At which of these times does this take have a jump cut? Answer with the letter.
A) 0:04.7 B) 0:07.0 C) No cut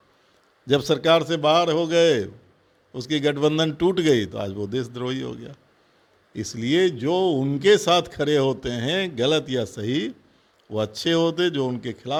C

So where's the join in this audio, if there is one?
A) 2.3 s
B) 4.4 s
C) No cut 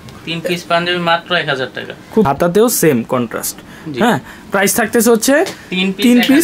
A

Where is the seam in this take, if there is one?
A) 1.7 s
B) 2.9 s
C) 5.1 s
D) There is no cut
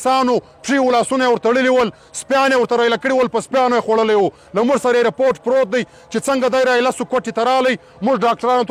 D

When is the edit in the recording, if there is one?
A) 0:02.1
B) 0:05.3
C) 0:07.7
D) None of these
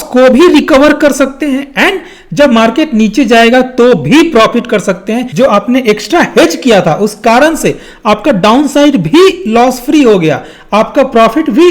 B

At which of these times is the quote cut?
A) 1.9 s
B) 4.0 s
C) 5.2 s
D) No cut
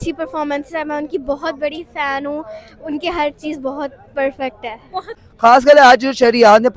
C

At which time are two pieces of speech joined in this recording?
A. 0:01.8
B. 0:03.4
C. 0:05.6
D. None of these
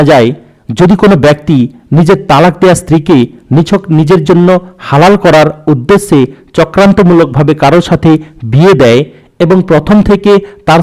D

